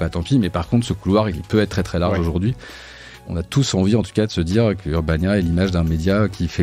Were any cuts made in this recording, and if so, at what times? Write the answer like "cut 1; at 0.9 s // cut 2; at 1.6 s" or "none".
cut 1; at 1.4 s // cut 2; at 3.1 s // cut 3; at 4.8 s

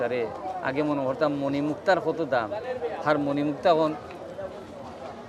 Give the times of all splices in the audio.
none

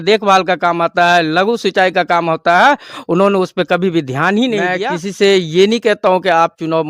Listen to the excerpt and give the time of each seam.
cut 1; at 4.7 s

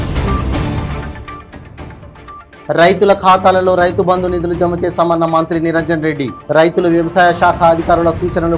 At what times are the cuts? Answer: cut 1; at 2.0 s

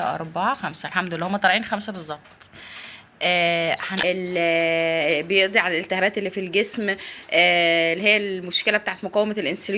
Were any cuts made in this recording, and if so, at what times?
cut 1; at 3.9 s

